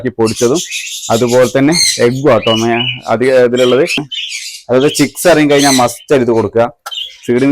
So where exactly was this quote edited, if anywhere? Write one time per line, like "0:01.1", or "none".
0:04.1